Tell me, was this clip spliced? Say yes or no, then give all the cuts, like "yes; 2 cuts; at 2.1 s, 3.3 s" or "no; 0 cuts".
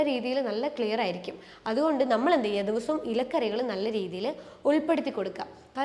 no; 0 cuts